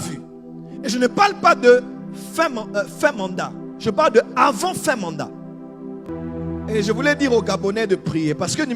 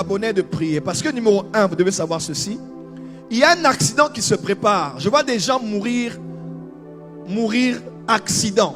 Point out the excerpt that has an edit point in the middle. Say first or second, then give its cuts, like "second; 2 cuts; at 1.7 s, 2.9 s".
first; 1 cut; at 6.0 s